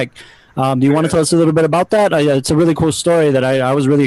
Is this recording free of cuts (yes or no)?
yes